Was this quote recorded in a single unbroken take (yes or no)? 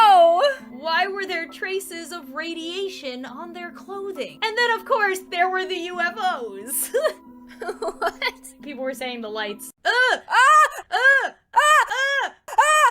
no